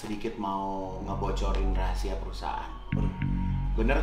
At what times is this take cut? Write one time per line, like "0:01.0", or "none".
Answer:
none